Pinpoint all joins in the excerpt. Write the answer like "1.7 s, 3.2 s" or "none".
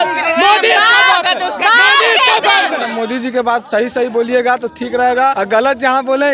2.9 s, 5.4 s